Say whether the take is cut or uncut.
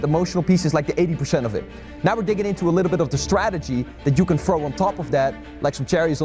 uncut